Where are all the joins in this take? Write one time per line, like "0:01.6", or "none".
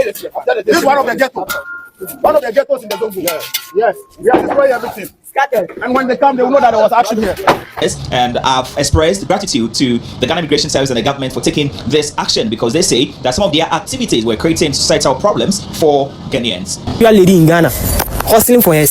0:07.8
0:17.0